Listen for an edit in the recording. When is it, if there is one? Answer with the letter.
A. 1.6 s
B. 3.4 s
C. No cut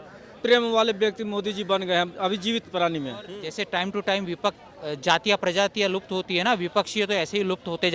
B